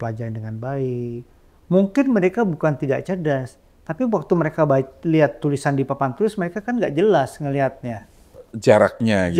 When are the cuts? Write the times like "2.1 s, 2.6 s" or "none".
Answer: none